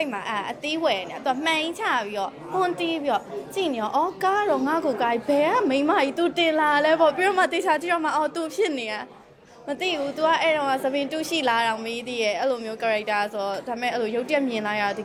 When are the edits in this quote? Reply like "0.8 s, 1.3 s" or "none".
none